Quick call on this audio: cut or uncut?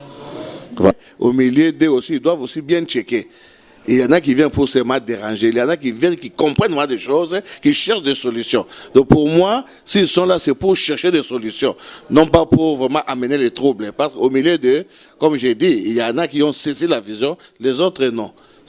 cut